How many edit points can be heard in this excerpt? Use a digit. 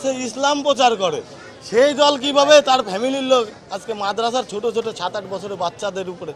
0